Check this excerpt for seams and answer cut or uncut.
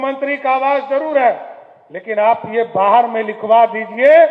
uncut